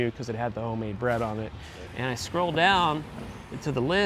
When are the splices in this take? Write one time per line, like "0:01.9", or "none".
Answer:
0:01.5